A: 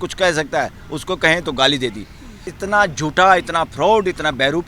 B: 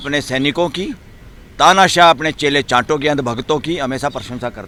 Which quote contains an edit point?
A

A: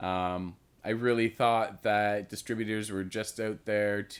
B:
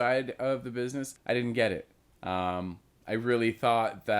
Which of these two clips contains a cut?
B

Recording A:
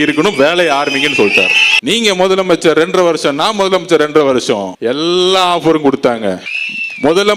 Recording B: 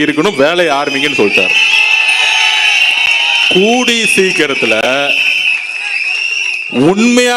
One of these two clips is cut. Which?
A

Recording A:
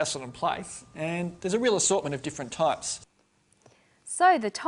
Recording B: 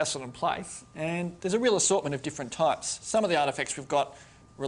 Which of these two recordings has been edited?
B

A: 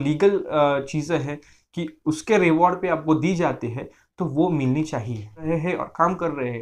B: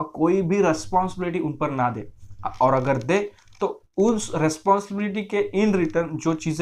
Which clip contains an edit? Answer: A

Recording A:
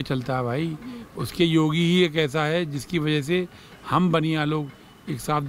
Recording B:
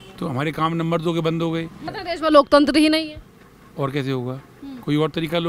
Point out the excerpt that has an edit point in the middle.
B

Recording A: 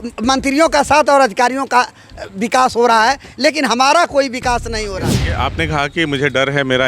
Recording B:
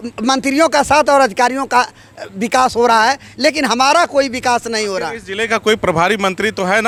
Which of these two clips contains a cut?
A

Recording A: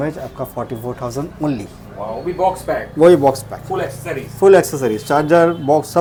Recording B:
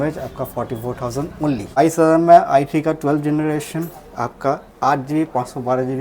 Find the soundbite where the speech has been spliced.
B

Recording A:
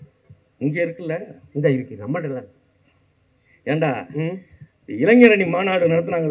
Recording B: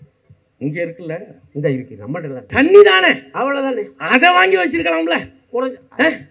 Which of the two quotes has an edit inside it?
B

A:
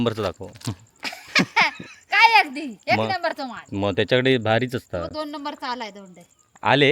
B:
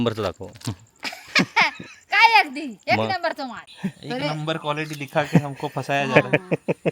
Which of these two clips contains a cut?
B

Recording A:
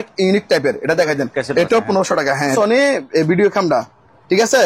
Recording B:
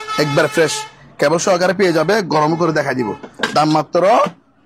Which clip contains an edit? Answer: A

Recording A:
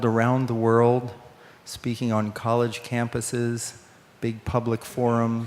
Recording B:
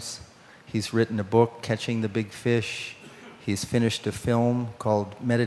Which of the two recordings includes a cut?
B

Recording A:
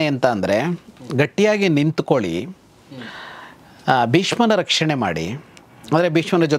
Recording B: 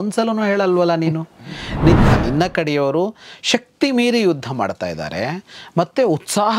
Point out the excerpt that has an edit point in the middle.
B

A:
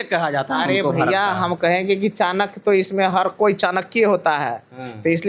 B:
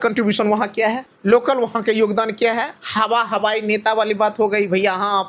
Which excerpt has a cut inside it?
B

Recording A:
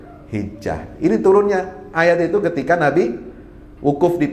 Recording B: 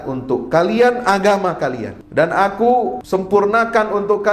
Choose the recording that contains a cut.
B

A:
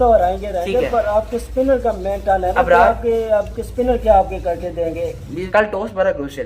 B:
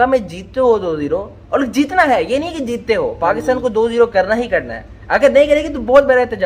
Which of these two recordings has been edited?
A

